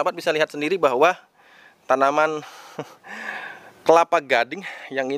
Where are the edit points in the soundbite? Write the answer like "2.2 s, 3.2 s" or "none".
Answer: none